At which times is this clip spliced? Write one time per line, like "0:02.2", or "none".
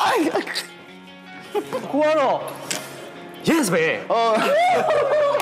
0:04.2